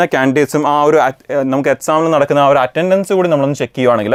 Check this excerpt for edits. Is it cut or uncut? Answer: uncut